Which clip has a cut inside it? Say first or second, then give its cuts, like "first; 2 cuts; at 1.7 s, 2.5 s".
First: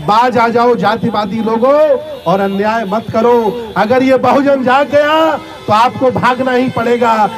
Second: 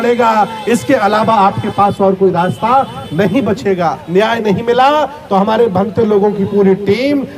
second; 1 cut; at 4.0 s